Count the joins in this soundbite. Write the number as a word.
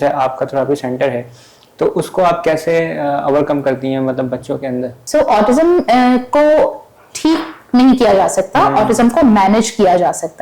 one